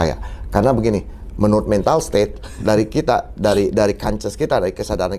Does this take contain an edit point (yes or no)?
no